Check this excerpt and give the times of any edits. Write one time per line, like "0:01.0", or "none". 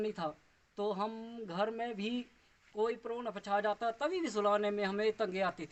none